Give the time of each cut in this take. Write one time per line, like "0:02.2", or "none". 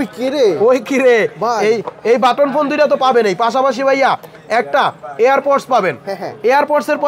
none